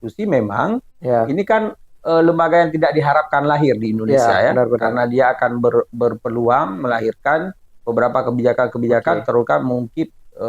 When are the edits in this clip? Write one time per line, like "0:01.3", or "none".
none